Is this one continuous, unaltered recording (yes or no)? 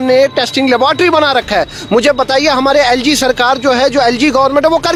yes